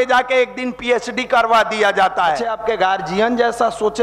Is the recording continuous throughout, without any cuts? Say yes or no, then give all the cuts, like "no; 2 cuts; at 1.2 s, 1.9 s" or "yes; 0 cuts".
no; 1 cut; at 2.5 s